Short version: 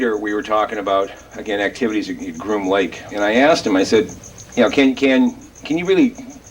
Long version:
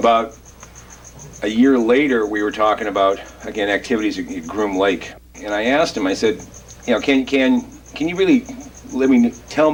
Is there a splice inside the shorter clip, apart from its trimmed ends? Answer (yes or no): yes